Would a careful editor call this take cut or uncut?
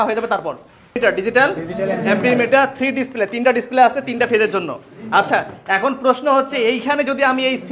cut